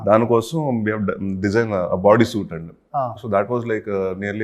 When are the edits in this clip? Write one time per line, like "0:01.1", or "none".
none